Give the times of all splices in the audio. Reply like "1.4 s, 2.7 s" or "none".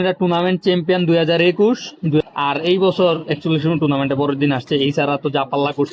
2.2 s